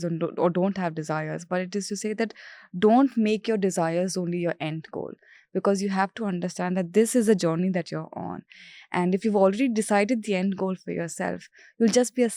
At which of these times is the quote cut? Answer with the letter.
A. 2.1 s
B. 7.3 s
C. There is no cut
C